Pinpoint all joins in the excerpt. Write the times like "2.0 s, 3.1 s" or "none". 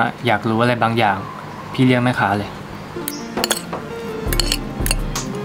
3.0 s